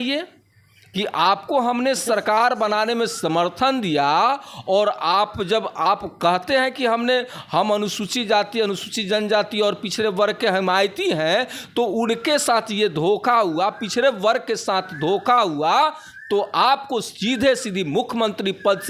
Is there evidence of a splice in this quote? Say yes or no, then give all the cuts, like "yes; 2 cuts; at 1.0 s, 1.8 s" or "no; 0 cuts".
no; 0 cuts